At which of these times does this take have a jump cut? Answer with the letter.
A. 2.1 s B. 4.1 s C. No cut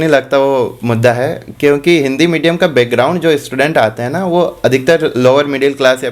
C